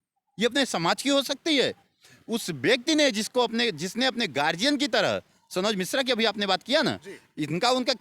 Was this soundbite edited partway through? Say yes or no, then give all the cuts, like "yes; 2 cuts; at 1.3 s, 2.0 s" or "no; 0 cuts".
no; 0 cuts